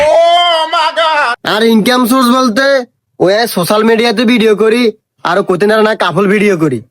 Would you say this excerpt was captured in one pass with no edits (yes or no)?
no